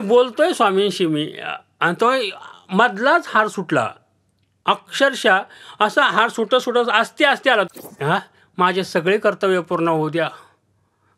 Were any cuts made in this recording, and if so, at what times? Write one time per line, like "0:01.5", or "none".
0:07.7